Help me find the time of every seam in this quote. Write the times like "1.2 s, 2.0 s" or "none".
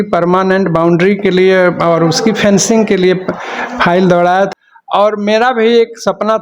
4.5 s